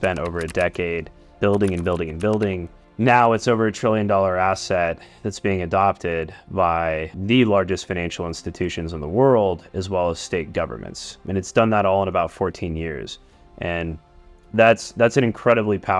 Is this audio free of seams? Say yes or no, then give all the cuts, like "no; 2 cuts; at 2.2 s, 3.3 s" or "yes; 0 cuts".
no; 1 cut; at 1.3 s